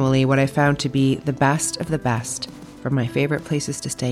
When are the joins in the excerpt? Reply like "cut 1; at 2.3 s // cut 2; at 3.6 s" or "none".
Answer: none